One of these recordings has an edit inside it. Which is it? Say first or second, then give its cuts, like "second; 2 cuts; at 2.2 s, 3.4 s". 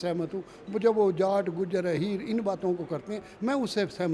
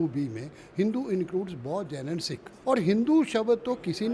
second; 1 cut; at 2.5 s